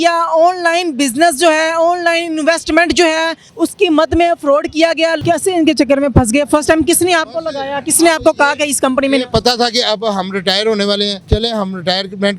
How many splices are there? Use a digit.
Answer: 3